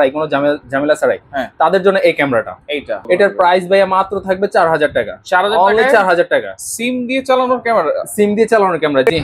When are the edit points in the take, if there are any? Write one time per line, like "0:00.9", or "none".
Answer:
0:03.0